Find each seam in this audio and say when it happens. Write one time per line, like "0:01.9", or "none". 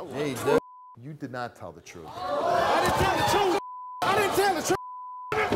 0:01.0